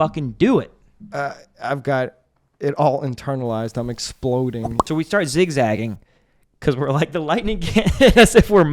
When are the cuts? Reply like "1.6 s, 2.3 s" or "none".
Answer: 4.8 s